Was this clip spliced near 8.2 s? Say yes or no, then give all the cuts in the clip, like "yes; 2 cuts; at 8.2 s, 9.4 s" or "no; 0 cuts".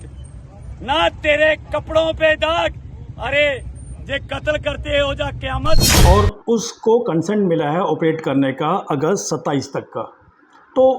no; 1 cut; at 5.9 s